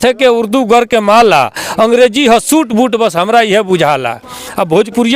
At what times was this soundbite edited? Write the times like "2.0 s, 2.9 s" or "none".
none